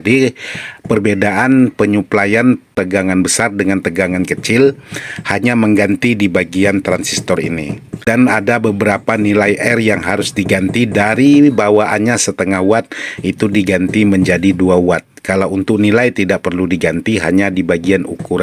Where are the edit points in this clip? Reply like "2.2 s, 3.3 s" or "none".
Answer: 2.7 s, 7.9 s